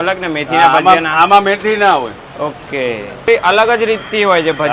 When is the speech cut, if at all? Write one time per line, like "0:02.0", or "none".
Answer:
0:03.3